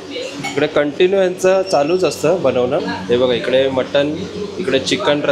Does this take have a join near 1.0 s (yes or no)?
no